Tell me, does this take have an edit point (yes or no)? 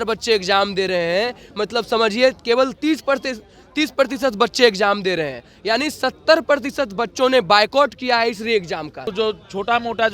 yes